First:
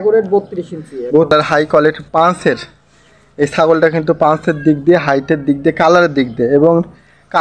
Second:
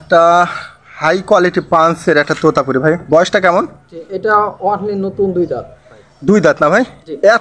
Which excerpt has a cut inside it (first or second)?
first